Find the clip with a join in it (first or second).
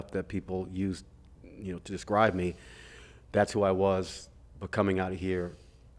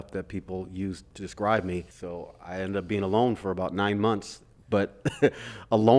second